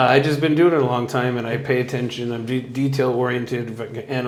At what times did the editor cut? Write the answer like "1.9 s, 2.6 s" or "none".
none